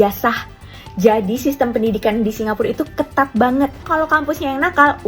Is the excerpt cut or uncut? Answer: cut